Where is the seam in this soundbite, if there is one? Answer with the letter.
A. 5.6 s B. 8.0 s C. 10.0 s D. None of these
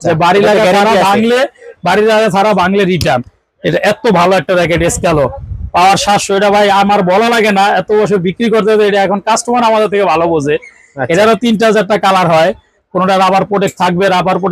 D